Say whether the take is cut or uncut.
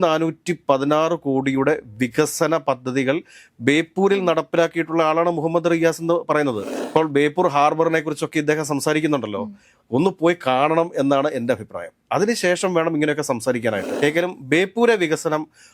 cut